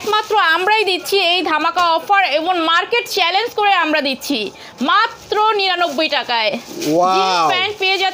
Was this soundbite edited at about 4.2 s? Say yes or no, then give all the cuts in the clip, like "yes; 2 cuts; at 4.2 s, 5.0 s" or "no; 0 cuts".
no; 0 cuts